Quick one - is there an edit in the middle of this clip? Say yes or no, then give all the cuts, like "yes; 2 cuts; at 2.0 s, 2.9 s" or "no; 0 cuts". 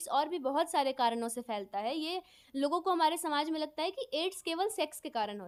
no; 0 cuts